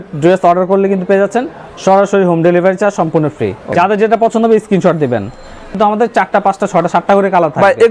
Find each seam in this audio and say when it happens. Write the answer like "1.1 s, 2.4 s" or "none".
3.7 s, 5.7 s